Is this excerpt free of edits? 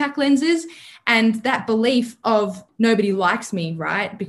no; 1 cut; at 2.6 s

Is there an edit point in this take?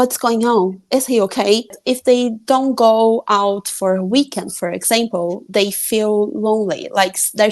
yes; 1 cut; at 1.8 s

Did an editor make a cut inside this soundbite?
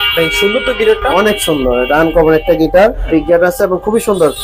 yes; 1 cut; at 3.0 s

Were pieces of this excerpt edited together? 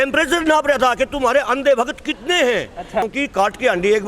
yes; 1 cut; at 3.1 s

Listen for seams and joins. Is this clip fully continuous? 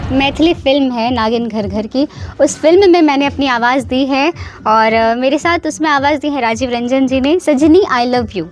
yes; 0 cuts

